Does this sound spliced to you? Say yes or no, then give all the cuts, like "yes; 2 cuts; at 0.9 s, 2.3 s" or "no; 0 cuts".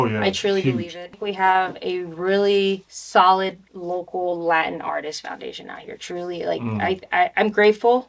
yes; 3 cuts; at 1.0 s, 2.9 s, 3.7 s